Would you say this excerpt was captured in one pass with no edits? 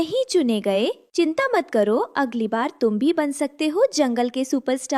yes; 0 cuts

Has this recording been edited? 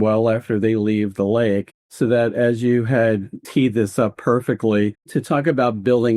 yes; 3 cuts; at 1.8 s, 3.4 s, 5.1 s

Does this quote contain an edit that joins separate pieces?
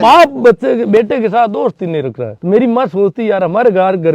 yes; 1 cut; at 2.3 s

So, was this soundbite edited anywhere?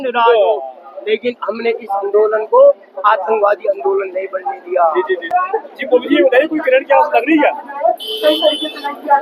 yes; 1 cut; at 5.3 s

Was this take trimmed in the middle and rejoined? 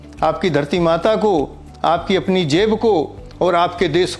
no; 0 cuts

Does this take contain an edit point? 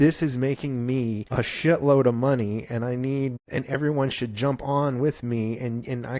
yes; 2 cuts; at 1.2 s, 3.4 s

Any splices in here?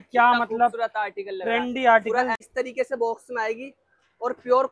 yes; 1 cut; at 2.4 s

